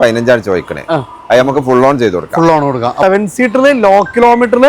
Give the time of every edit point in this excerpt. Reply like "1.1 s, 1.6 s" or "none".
3.0 s